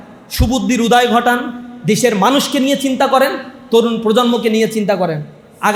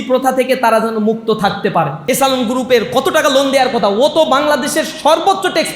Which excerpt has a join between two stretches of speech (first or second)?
second